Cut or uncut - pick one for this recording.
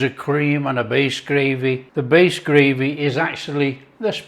cut